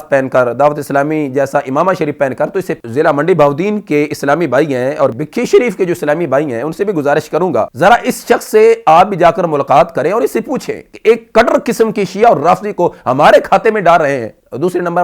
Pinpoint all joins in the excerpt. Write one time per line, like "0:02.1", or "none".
0:02.7
0:05.1
0:07.7